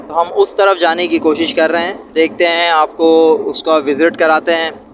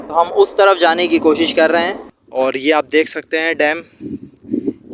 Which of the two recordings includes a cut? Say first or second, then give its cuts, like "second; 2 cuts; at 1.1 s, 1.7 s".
second; 1 cut; at 2.1 s